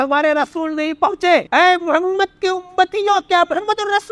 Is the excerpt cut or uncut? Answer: cut